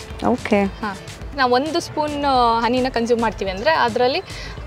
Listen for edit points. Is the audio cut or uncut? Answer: cut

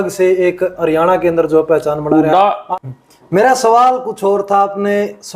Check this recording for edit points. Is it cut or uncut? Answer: cut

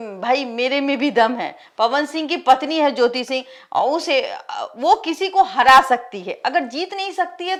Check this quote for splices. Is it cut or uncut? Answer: uncut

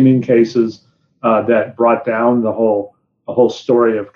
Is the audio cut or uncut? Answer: uncut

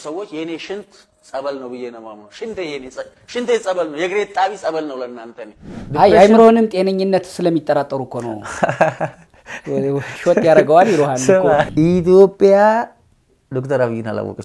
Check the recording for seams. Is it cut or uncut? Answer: cut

